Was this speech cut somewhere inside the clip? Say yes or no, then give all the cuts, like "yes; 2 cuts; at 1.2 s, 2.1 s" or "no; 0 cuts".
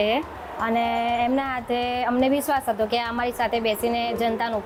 no; 0 cuts